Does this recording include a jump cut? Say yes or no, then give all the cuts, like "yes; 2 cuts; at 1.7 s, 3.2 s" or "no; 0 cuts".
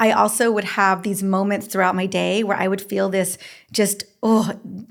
no; 0 cuts